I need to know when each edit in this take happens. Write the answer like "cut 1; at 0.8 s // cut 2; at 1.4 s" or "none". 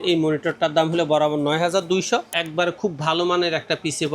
cut 1; at 2.4 s